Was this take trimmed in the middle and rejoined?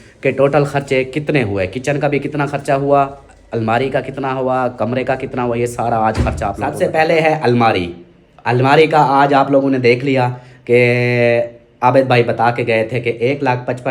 yes; 1 cut; at 6.7 s

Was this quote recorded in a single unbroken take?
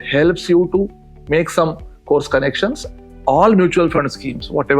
no; 1 cut; at 2.8 s

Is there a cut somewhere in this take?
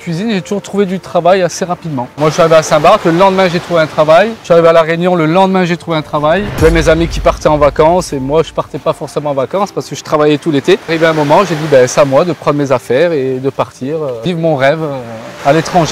yes; 4 cuts; at 2.2 s, 6.5 s, 10.9 s, 14.2 s

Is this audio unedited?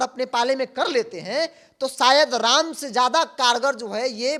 yes; 0 cuts

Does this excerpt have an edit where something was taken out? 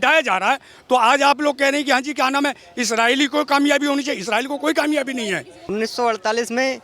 yes; 1 cut; at 5.6 s

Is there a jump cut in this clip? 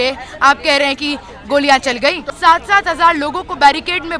yes; 1 cut; at 2.3 s

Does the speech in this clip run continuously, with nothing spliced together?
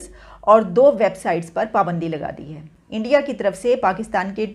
yes; 0 cuts

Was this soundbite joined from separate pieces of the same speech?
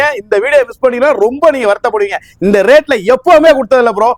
no; 0 cuts

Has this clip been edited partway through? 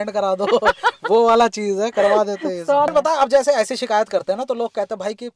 no; 0 cuts

